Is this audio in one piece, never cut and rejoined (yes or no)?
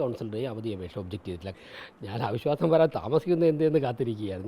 no